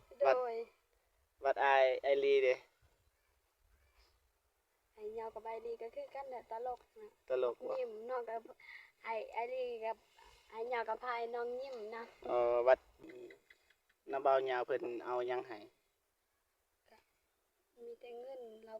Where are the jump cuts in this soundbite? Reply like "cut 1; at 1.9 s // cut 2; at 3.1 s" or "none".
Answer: cut 1; at 12.9 s